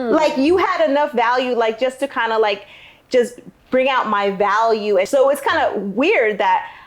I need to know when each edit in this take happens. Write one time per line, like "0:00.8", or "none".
0:05.1